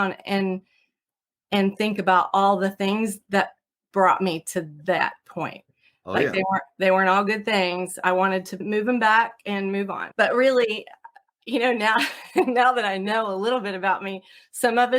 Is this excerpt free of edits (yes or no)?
no